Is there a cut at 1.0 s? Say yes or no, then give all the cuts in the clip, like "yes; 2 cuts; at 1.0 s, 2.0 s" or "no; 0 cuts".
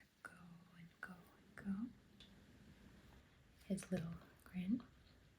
no; 1 cut; at 3.2 s